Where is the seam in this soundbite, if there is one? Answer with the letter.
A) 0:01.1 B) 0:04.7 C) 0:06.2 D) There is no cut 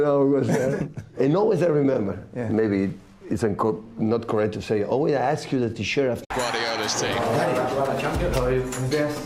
D